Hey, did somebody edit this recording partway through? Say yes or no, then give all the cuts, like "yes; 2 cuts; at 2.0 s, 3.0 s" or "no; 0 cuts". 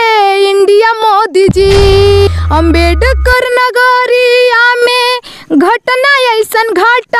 yes; 1 cut; at 2.3 s